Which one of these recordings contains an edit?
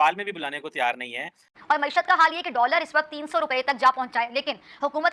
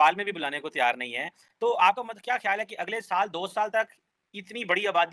first; 1 cut; at 1.5 s

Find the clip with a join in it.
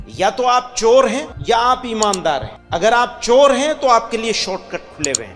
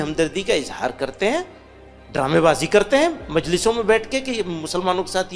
first; 2 cuts; at 1.3 s, 2.5 s

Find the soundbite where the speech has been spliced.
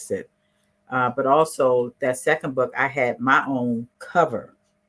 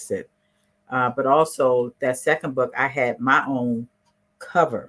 first; 1 cut; at 4.0 s

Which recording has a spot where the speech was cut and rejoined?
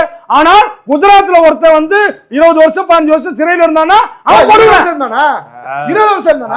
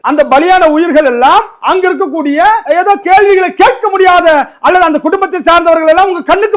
second; 2 cuts; at 1.6 s, 2.6 s

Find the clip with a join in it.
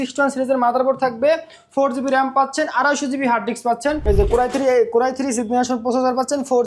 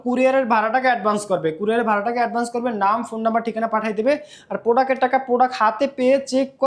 first; 1 cut; at 4.0 s

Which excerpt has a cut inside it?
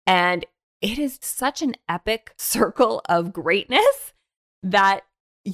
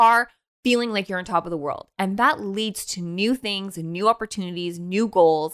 first; 2 cuts; at 1.2 s, 2.4 s

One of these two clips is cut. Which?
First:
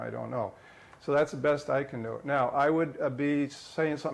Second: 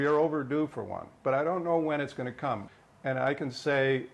second; 1 cut; at 2.7 s

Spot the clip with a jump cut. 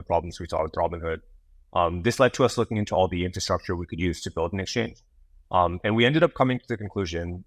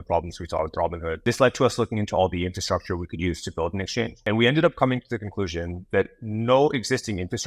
second; 2 cuts; at 1.2 s, 4.2 s

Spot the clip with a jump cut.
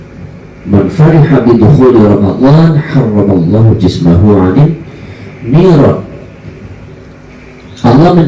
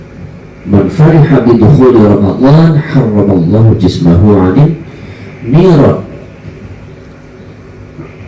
first; 1 cut; at 7.3 s

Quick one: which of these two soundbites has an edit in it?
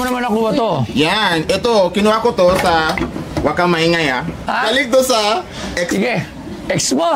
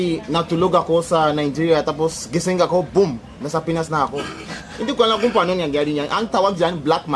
first; 1 cut; at 4.4 s

